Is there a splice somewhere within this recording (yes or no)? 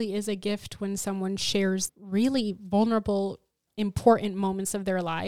yes